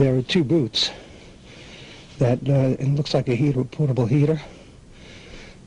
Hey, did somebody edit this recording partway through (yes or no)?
no